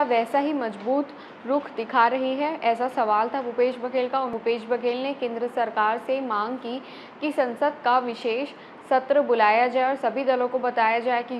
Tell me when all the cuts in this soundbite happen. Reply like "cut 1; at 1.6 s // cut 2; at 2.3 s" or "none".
cut 1; at 4.3 s